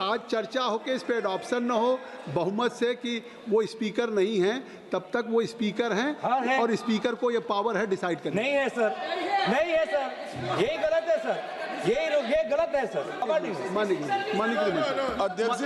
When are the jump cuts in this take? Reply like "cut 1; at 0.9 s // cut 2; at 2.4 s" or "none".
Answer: cut 1; at 13.2 s